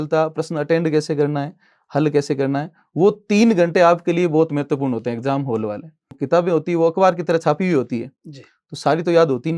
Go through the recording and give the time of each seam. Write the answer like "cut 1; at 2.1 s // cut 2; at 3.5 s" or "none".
cut 1; at 6.1 s

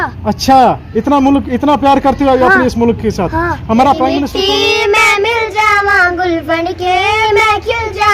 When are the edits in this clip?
cut 1; at 4.3 s

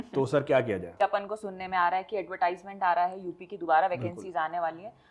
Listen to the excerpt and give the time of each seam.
cut 1; at 1.0 s

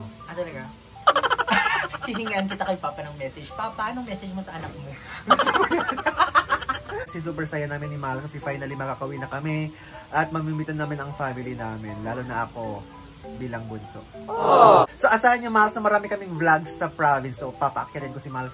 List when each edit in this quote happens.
cut 1; at 7.1 s // cut 2; at 14.8 s

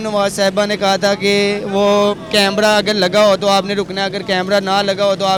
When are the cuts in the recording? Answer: none

